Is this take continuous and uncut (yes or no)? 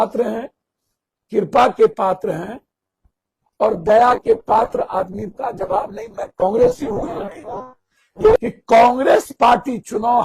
no